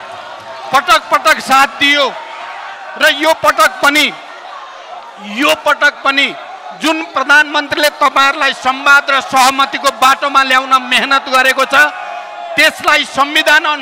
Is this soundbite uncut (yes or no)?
yes